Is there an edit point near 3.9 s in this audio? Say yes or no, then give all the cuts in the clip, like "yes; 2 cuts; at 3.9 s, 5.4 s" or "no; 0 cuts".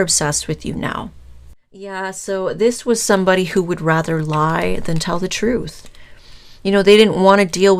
no; 1 cut; at 2.0 s